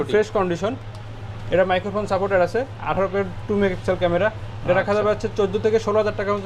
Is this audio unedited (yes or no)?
yes